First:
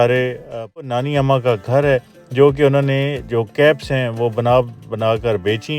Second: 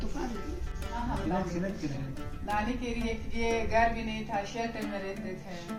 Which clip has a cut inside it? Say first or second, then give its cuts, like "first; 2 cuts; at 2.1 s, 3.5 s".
first; 1 cut; at 0.9 s